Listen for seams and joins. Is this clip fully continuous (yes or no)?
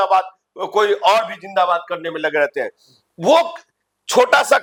yes